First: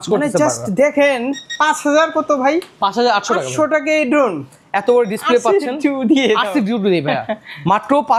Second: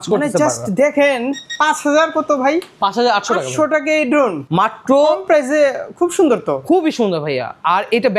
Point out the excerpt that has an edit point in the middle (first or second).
second